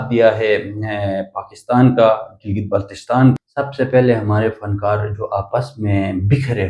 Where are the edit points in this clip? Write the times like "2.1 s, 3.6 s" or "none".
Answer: 3.4 s